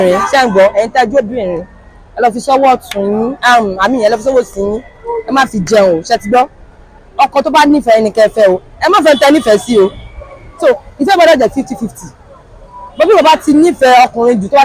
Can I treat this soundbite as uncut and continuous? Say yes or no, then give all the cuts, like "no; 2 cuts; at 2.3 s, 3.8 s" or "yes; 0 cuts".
yes; 0 cuts